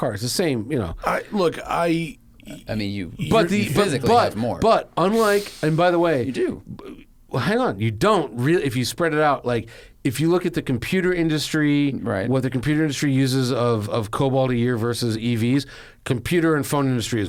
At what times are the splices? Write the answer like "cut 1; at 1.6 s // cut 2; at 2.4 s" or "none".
none